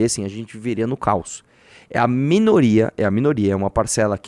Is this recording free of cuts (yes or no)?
yes